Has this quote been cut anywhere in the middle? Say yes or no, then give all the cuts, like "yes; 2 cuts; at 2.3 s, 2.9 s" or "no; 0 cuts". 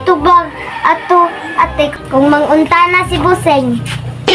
no; 0 cuts